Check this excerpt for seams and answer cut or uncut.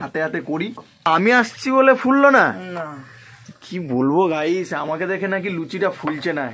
cut